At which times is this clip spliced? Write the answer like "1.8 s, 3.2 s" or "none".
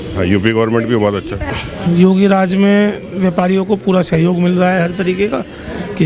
1.5 s